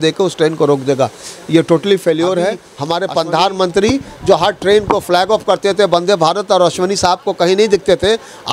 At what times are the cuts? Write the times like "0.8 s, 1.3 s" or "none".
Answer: 2.7 s